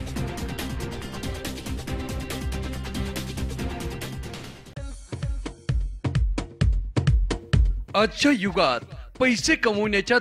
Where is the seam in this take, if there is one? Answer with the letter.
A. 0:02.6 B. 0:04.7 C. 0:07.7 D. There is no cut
B